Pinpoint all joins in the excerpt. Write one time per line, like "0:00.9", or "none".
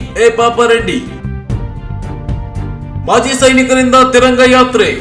none